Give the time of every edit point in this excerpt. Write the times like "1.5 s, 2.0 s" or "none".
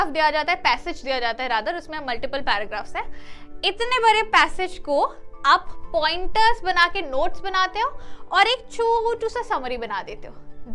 none